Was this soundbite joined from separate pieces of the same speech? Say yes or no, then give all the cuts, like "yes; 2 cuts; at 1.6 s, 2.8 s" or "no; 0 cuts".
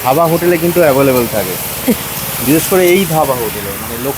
no; 0 cuts